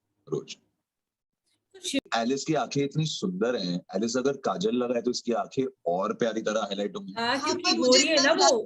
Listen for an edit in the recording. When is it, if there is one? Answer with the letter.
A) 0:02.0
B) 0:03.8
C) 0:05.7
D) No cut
A